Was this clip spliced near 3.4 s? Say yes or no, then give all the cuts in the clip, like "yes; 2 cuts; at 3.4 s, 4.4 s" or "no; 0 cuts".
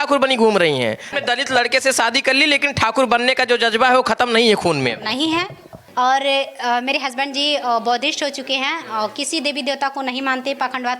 no; 2 cuts; at 1.1 s, 5.8 s